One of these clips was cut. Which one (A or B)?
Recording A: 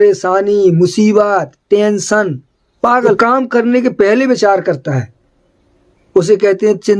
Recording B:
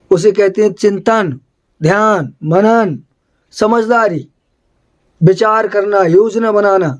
A